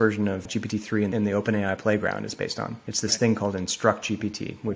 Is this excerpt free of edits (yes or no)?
no